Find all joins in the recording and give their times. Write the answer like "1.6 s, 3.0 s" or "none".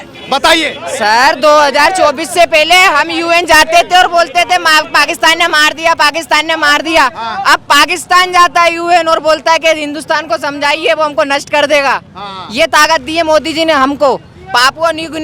none